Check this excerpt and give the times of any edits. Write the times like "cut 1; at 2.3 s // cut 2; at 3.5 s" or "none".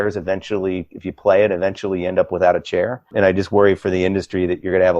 cut 1; at 3.0 s